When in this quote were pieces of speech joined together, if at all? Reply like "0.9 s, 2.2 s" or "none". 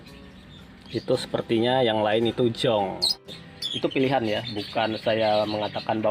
3.3 s